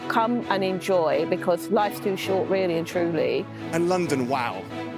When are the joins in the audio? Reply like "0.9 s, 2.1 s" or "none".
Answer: none